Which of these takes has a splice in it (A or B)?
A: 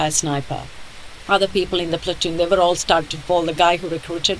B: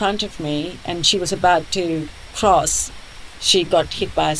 A